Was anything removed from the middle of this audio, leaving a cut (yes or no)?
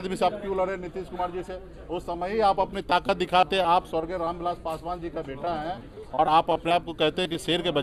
no